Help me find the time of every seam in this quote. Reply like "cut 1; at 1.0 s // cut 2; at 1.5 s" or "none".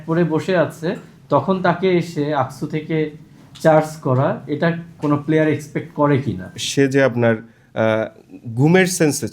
cut 1; at 4.9 s // cut 2; at 6.6 s

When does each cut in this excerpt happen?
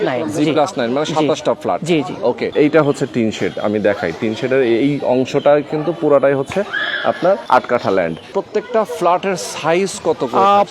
cut 1; at 2.5 s // cut 2; at 7.4 s // cut 3; at 8.3 s

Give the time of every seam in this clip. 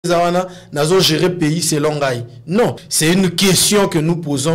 cut 1; at 2.9 s

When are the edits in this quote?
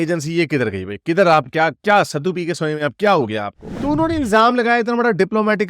cut 1; at 3.7 s

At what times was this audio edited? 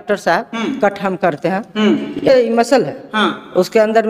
cut 1; at 2.3 s

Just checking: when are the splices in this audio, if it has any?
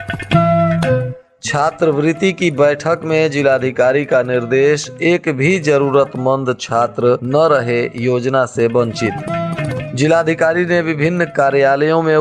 cut 1; at 1.1 s

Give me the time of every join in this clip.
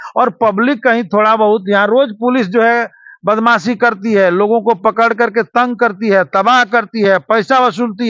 none

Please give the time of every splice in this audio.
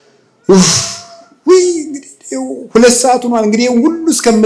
none

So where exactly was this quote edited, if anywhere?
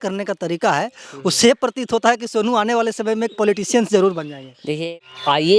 cut 1; at 4.7 s

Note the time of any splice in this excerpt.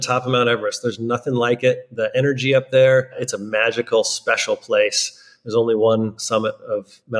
cut 1; at 3.3 s // cut 2; at 6.2 s

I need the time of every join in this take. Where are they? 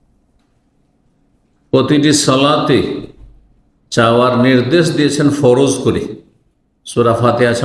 none

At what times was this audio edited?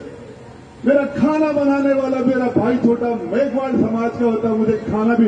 none

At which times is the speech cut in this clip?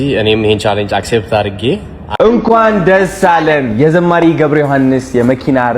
cut 1; at 2.0 s

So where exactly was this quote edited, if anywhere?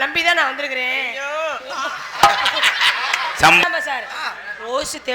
cut 1; at 3.6 s

